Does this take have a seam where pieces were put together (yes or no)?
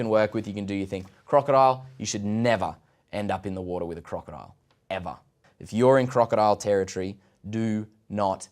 yes